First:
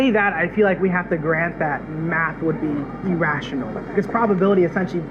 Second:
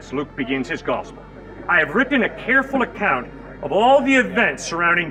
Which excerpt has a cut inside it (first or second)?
first